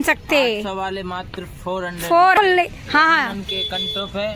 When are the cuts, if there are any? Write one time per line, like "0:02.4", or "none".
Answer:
0:02.4